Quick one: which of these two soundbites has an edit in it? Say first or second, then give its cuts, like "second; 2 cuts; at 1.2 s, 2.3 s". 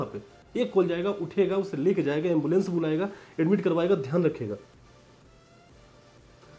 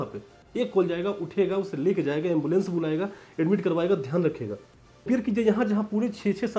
second; 1 cut; at 5.1 s